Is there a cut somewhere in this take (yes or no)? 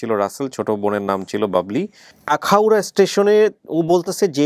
yes